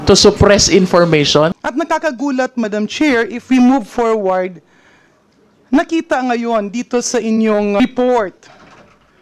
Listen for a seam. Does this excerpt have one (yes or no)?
yes